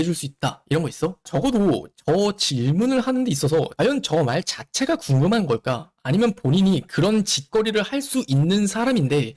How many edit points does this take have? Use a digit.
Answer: 1